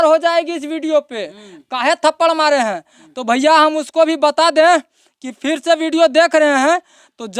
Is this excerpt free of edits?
yes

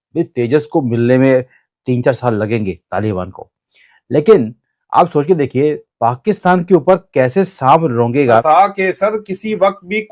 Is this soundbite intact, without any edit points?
no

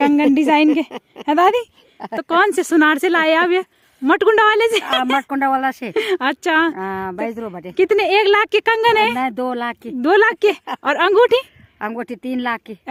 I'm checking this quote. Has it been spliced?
no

